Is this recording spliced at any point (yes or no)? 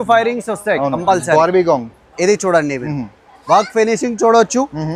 no